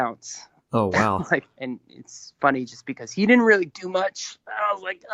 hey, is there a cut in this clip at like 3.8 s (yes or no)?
no